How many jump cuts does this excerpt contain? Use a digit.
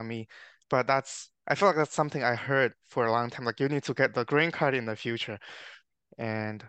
1